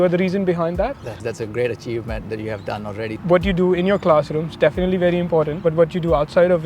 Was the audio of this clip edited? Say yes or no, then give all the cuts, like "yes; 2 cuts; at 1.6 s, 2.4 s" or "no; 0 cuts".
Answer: yes; 3 cuts; at 1.2 s, 3.2 s, 5.5 s